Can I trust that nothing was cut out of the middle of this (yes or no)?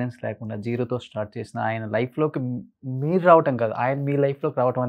yes